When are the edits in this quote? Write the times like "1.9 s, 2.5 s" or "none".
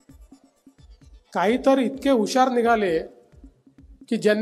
1.3 s